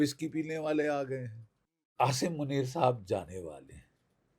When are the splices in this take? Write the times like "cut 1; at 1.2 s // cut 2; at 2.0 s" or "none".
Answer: cut 1; at 1.9 s

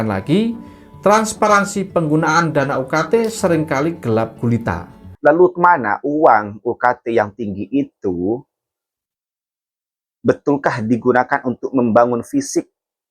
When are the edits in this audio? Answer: cut 1; at 5.0 s

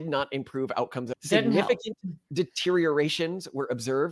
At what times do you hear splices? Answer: cut 1; at 1.1 s

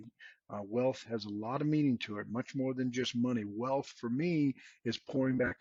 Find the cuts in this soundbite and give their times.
none

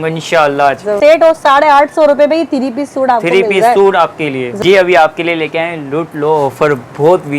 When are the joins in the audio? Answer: cut 1; at 0.9 s // cut 2; at 4.5 s

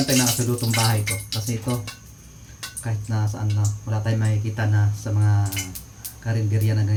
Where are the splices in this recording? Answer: none

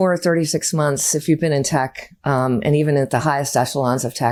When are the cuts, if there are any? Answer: none

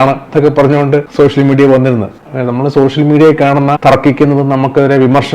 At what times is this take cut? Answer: cut 1; at 2.2 s // cut 2; at 3.8 s

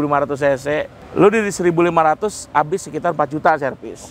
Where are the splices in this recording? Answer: cut 1; at 1.0 s

